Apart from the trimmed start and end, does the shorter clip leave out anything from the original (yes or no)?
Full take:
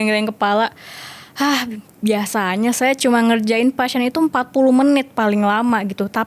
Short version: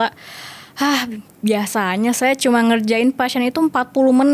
no